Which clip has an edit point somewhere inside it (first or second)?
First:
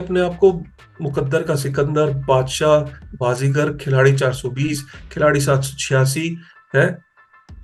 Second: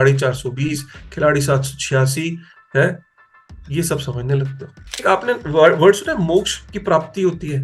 second